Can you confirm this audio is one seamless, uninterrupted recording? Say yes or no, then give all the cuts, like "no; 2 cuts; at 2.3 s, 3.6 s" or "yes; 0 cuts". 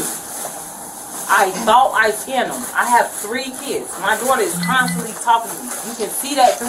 yes; 0 cuts